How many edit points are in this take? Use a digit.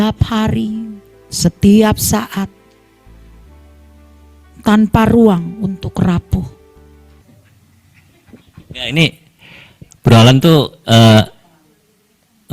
1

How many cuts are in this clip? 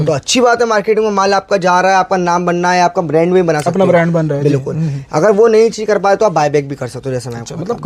0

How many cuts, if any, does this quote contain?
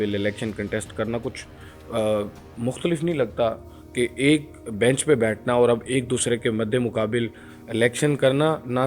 0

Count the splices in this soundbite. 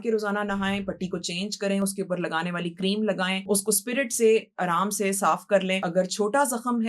2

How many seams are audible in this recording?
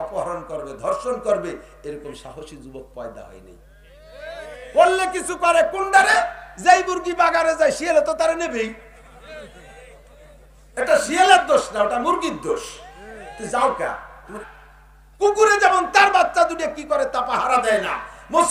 1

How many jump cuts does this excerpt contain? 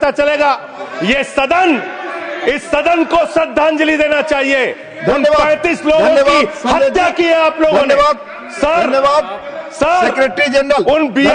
0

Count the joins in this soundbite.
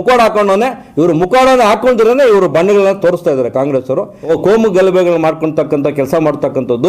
1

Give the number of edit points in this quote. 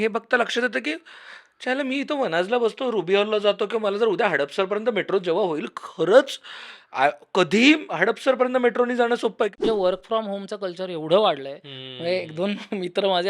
1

